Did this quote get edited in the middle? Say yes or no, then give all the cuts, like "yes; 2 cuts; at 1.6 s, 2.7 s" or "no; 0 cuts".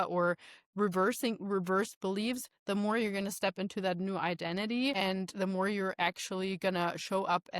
yes; 1 cut; at 5.0 s